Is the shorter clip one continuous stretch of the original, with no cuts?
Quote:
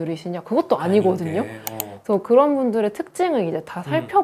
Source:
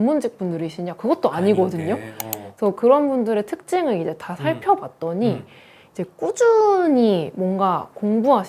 yes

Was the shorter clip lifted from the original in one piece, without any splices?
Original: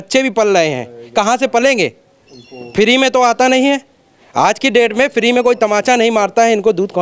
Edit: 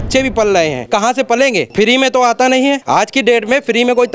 no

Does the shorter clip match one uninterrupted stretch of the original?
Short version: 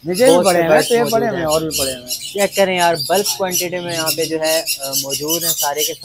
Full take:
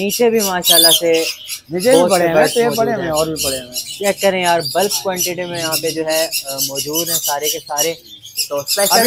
yes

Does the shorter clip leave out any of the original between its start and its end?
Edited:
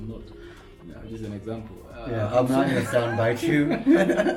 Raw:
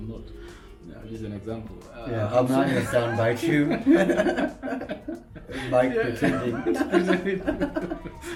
no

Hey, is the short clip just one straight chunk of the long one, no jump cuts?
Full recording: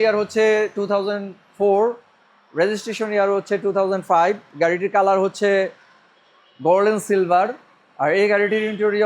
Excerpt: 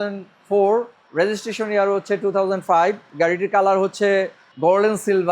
no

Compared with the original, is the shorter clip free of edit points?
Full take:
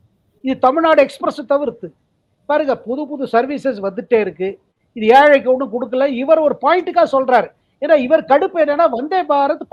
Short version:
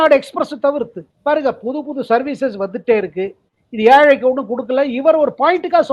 no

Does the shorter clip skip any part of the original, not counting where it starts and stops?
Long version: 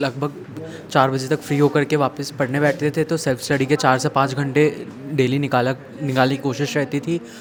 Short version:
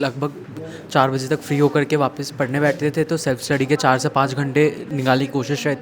yes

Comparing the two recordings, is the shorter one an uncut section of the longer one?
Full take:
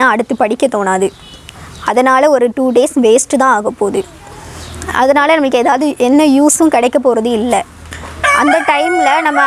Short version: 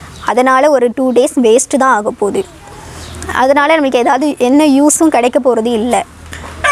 yes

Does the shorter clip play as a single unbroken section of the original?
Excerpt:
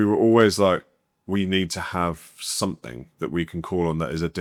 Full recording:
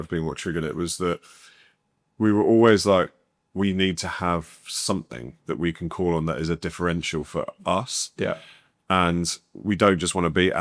yes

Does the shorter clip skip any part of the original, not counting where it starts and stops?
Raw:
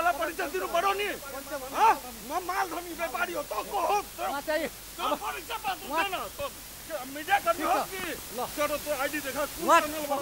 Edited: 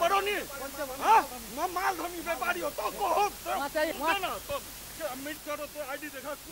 yes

